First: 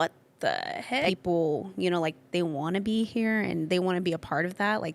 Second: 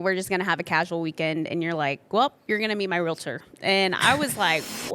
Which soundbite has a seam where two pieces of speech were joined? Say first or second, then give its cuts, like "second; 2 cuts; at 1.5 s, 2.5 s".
first; 1 cut; at 1.1 s